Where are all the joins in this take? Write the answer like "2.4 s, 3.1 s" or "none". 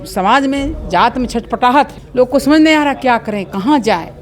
2.0 s